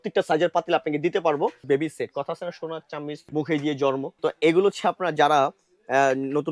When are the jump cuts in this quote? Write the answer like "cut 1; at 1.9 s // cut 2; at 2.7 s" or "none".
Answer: cut 1; at 1.6 s // cut 2; at 3.3 s // cut 3; at 4.1 s